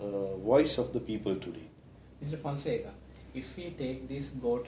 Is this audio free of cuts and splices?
yes; 0 cuts

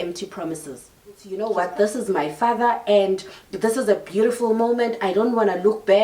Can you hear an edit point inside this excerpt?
yes; 1 cut; at 1.3 s

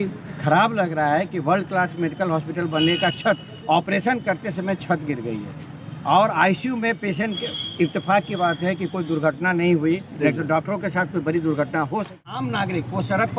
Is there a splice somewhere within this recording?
yes; 1 cut; at 12.3 s

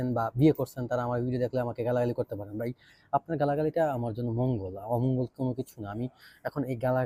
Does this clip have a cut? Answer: no; 0 cuts

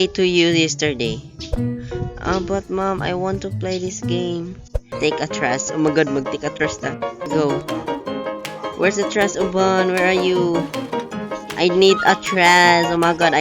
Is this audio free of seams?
no; 2 cuts; at 4.9 s, 7.2 s

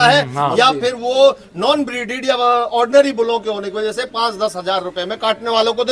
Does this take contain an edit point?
no; 0 cuts

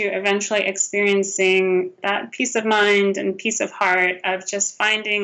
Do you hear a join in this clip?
yes; 1 cut; at 2.0 s

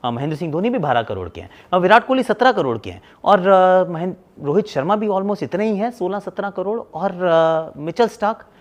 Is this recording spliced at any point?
no; 0 cuts

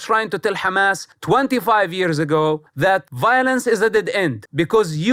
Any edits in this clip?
no; 0 cuts

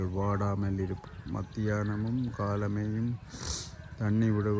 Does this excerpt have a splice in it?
yes; 1 cut; at 1.0 s

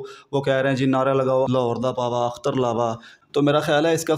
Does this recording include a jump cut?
yes; 2 cuts; at 1.5 s, 3.1 s

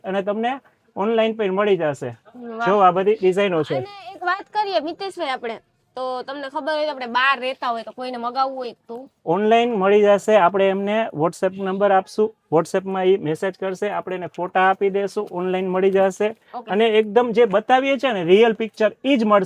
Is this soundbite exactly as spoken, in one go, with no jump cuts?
yes; 0 cuts

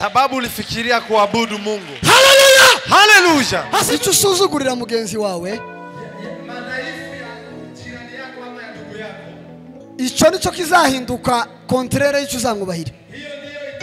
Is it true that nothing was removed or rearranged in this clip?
no; 1 cut; at 3.7 s

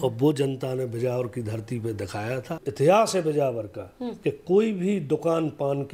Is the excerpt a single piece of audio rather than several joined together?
no; 1 cut; at 2.5 s

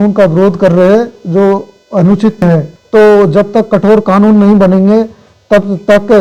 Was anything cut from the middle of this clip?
yes; 1 cut; at 2.4 s

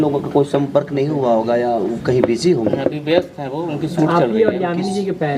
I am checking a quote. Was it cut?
no; 0 cuts

